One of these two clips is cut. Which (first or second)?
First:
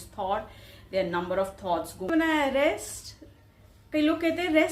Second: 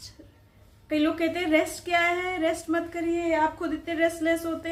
first